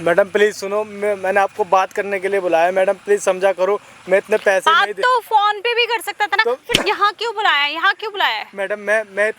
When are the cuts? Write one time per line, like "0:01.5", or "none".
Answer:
none